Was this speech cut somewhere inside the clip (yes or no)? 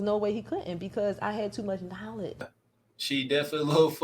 yes